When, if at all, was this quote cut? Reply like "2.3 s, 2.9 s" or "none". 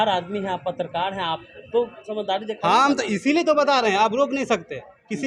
none